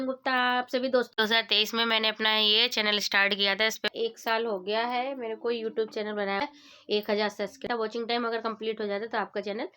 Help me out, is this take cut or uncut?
cut